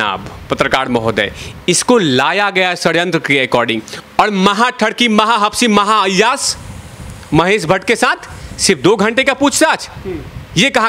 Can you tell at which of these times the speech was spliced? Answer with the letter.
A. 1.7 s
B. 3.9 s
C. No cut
B